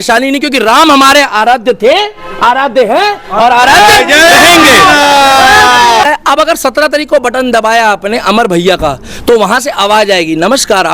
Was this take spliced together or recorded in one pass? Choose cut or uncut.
cut